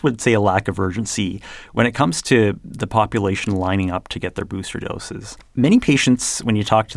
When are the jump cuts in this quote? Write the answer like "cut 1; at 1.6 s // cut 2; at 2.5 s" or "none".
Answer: cut 1; at 5.4 s